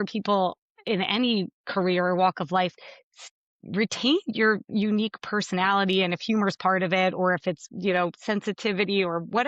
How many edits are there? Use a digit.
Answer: 1